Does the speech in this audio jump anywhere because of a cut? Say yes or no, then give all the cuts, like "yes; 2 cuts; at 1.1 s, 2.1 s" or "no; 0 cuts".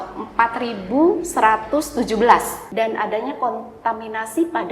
yes; 1 cut; at 2.6 s